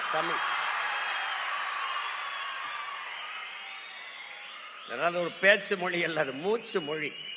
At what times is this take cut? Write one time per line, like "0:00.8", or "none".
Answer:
none

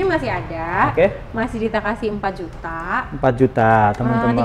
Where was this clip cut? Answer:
none

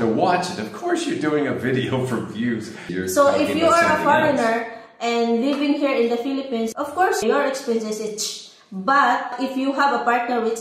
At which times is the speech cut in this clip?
0:02.8
0:07.0
0:09.3

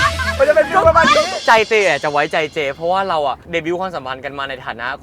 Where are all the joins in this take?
0:01.3
0:03.4

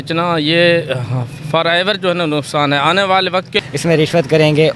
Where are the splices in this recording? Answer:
0:03.6

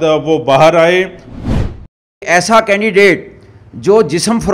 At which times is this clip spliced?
0:01.6

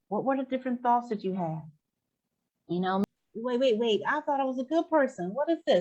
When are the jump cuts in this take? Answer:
0:03.0

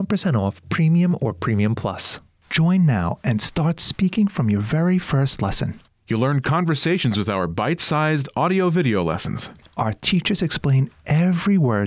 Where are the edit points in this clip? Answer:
0:02.1

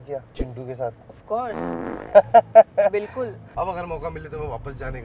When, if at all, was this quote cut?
0:03.4

